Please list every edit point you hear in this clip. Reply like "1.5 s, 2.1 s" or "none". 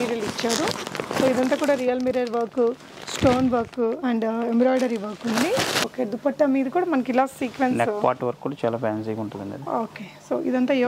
5.9 s